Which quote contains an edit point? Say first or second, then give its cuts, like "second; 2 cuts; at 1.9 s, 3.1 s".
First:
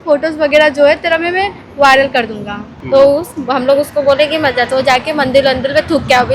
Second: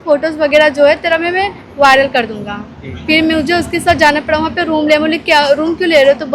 first; 1 cut; at 2.7 s